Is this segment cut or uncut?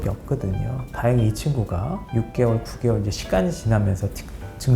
cut